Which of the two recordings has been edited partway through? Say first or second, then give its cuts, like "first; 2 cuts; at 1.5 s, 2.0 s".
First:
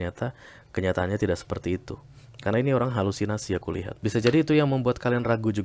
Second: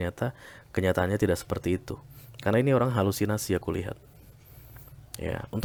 first; 1 cut; at 3.9 s